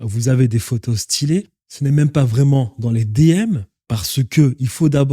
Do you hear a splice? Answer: yes; 1 cut; at 1.6 s

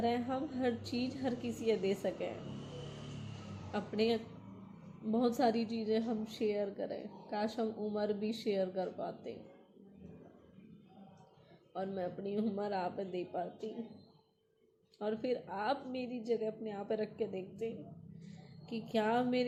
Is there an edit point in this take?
no; 0 cuts

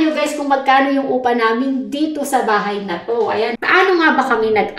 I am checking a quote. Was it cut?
yes; 1 cut; at 3.6 s

